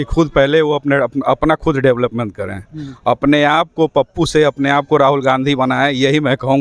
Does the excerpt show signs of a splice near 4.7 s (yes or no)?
no